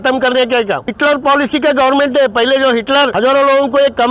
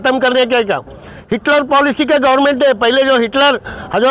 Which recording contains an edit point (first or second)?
first